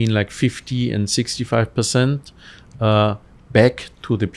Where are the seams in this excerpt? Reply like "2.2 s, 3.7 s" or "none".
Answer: none